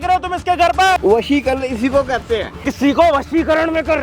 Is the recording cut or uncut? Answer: cut